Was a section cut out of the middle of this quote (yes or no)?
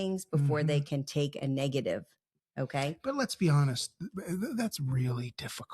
no